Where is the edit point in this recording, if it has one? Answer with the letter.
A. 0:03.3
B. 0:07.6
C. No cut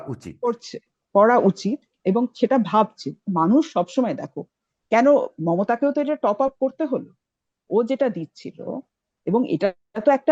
C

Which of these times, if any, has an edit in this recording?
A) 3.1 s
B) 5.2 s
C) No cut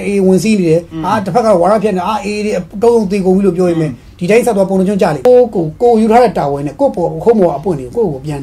B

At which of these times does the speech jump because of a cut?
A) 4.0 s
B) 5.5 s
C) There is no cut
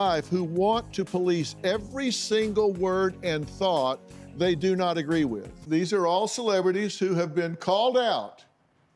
B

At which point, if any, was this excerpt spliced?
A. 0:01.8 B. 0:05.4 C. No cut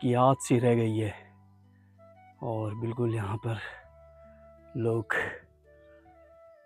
B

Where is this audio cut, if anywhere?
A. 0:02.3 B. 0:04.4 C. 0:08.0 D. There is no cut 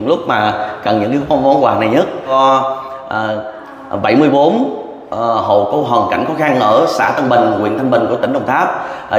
A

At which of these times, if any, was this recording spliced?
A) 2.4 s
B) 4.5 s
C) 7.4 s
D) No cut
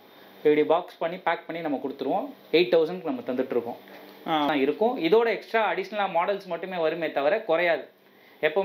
B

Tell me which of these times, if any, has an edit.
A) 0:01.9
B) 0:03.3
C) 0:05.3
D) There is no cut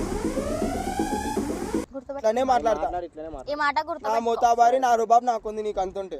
A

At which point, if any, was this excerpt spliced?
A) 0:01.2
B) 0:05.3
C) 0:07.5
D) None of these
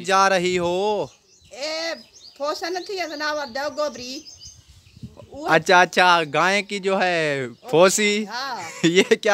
D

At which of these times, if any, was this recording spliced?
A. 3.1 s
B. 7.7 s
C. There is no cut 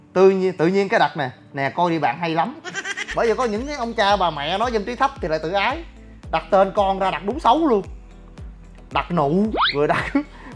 A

